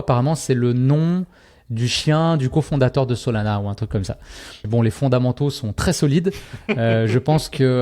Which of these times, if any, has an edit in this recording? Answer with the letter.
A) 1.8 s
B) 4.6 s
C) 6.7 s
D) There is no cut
B